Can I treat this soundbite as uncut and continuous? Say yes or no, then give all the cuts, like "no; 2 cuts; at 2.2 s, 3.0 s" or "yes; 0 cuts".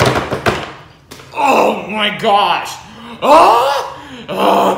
yes; 0 cuts